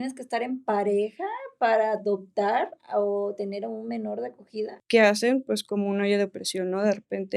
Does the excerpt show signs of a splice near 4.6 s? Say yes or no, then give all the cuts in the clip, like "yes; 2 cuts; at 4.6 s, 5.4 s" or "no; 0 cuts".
yes; 1 cut; at 4.6 s